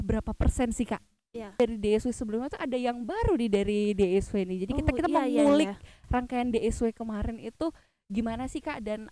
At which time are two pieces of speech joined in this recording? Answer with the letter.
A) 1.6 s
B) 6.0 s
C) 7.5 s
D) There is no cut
A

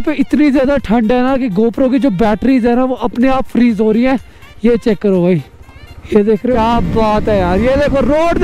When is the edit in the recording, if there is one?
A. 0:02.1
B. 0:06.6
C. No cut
B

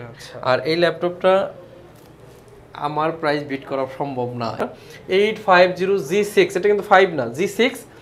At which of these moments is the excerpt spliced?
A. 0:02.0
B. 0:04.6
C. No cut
B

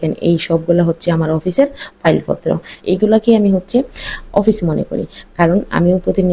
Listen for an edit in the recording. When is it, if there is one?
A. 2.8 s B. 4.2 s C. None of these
A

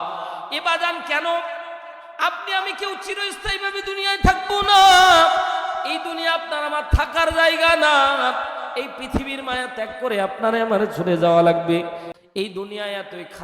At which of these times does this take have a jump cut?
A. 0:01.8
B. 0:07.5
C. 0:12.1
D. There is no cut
C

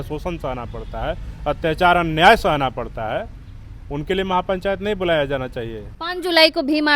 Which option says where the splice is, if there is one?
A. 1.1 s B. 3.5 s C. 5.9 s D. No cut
C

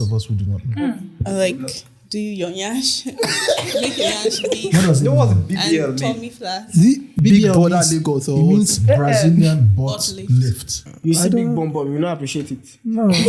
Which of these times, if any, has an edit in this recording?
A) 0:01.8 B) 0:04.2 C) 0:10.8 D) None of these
C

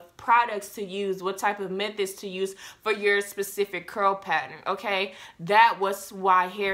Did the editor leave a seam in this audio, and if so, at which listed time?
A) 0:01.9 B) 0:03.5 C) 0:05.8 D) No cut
D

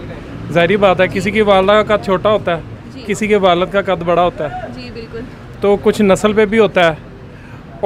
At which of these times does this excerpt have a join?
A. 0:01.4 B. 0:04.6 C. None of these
C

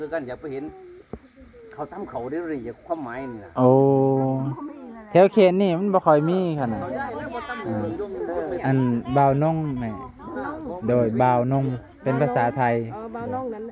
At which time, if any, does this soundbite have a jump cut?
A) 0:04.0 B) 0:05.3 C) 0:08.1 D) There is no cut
C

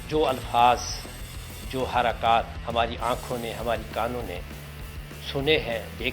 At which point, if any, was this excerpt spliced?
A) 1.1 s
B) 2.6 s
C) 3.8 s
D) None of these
B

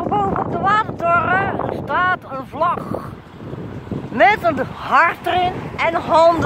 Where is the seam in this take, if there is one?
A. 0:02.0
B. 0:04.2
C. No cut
C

